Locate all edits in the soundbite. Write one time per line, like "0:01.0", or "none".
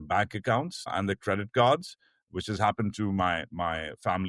none